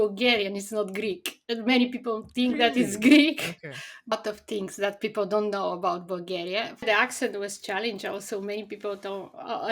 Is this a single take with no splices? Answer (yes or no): no